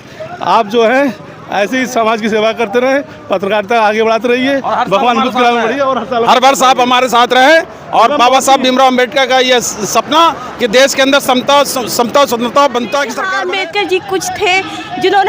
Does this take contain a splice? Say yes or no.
yes